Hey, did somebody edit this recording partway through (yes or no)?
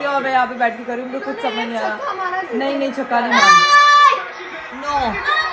no